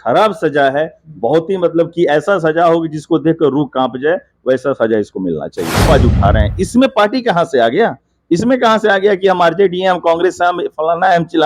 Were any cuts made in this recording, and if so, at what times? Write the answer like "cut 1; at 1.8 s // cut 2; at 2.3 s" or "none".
cut 1; at 5.9 s